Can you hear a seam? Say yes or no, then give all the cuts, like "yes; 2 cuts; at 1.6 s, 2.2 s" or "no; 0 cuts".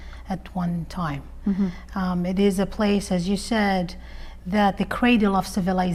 no; 0 cuts